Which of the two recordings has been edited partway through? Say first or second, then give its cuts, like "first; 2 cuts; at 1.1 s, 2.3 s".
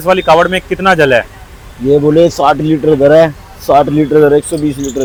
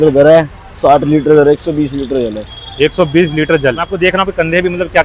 second; 1 cut; at 3.9 s